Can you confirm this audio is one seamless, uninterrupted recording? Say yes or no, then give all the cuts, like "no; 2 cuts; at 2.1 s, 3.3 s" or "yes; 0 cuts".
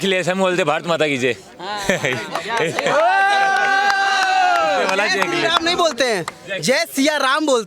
yes; 0 cuts